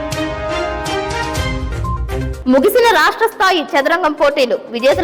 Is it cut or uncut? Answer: cut